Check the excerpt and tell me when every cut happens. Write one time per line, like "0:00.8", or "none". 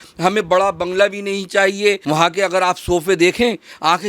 0:02.0